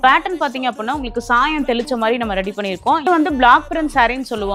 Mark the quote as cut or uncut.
cut